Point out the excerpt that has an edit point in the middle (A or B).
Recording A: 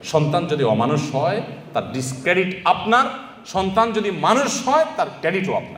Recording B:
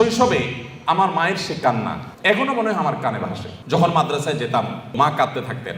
B